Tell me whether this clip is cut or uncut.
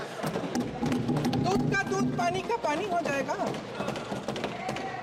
uncut